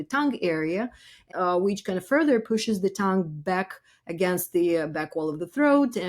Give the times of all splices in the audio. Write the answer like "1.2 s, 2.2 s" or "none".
1.3 s